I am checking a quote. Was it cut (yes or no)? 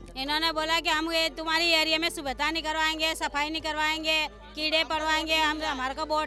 no